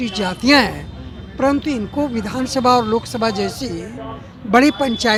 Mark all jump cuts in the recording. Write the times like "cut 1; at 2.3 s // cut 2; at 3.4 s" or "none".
none

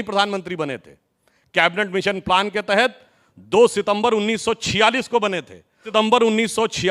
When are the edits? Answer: cut 1; at 5.9 s

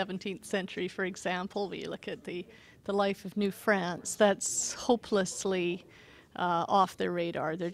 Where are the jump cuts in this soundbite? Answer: none

